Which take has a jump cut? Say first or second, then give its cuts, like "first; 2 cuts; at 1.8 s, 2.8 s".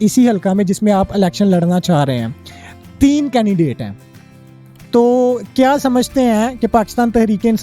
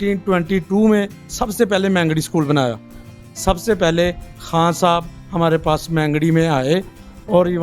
second; 1 cut; at 3.1 s